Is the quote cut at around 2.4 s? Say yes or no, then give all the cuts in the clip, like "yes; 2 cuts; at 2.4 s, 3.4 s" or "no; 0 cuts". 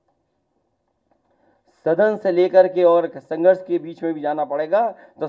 no; 0 cuts